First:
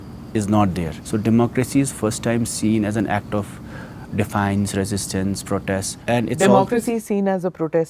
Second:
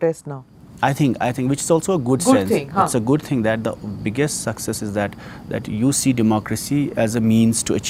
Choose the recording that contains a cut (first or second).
first